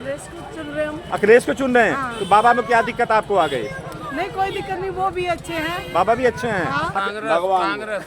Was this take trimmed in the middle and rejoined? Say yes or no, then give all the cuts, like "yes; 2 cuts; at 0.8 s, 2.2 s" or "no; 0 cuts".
yes; 1 cut; at 6.9 s